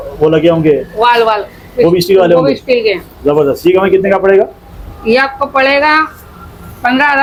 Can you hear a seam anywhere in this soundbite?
no; 0 cuts

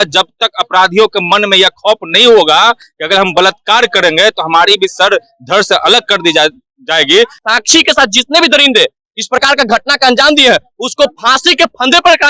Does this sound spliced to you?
yes; 1 cut; at 7.4 s

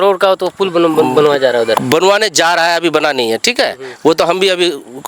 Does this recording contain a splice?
no; 0 cuts

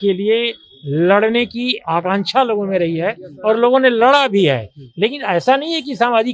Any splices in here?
no; 0 cuts

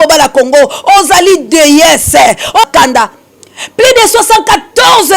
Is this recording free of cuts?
no; 1 cut; at 2.6 s

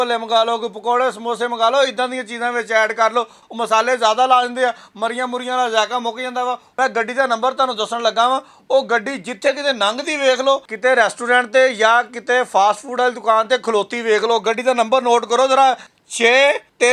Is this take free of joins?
no; 4 cuts; at 3.4 s, 6.6 s, 10.7 s, 16.1 s

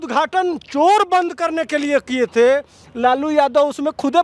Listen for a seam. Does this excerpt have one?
no; 0 cuts

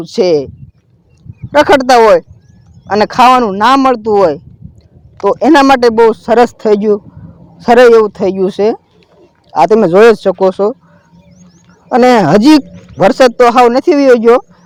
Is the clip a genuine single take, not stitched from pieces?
yes; 0 cuts

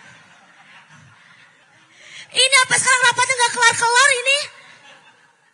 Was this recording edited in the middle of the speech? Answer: yes; 1 cut; at 1.6 s

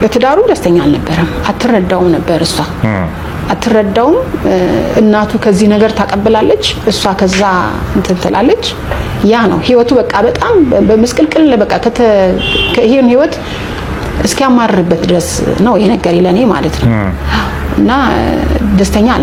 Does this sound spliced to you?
no; 0 cuts

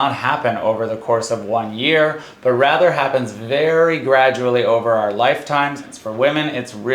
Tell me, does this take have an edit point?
yes; 1 cut; at 5.9 s

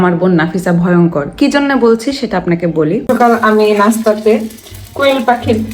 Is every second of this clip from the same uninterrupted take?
no; 1 cut; at 3.1 s

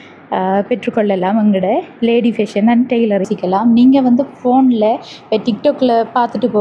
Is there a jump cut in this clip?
yes; 1 cut; at 3.3 s

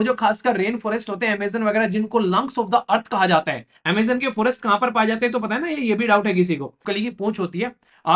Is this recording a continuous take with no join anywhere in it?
no; 1 cut; at 6.8 s

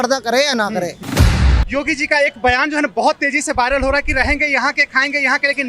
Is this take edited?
yes; 1 cut; at 1.2 s

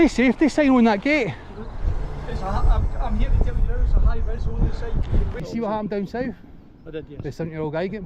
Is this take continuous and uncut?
no; 1 cut; at 5.3 s

